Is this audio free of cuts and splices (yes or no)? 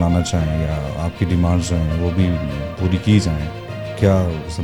yes